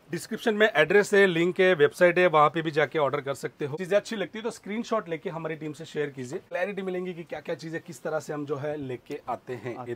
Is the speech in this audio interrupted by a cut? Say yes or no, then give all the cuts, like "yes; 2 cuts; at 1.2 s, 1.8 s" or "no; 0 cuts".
yes; 2 cuts; at 3.7 s, 6.4 s